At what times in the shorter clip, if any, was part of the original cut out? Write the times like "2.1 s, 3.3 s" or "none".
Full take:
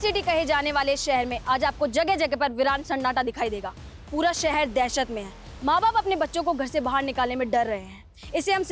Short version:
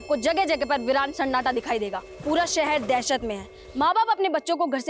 2.1 s